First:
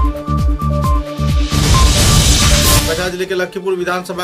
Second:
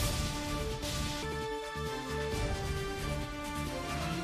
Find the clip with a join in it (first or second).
first